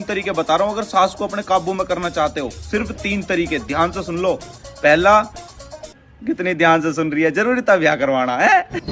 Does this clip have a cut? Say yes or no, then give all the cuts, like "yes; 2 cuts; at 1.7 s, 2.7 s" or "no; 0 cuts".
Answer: no; 0 cuts